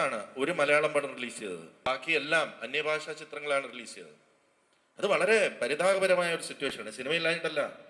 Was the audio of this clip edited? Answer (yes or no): no